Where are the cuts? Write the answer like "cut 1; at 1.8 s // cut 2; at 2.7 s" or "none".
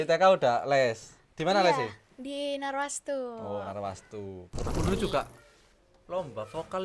cut 1; at 4.5 s